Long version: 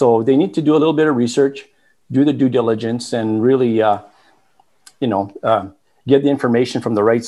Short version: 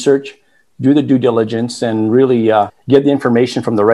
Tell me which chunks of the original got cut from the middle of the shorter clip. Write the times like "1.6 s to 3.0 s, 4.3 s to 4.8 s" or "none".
4.1 s to 6.0 s

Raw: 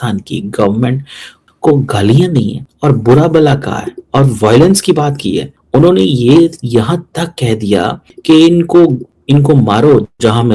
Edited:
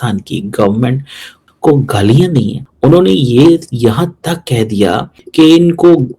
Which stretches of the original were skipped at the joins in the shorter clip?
2.6 s to 5.5 s

